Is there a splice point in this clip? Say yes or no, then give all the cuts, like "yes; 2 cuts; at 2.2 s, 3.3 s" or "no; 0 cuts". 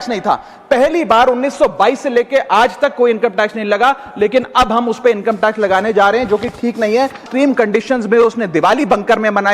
yes; 1 cut; at 7.2 s